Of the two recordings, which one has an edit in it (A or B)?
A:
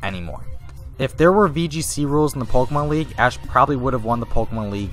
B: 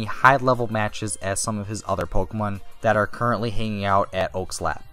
B